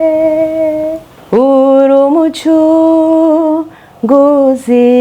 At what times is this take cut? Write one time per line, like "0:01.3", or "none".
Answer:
0:01.1